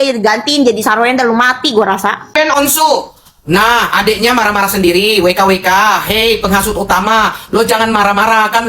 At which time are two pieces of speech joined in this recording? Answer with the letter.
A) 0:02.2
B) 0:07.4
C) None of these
A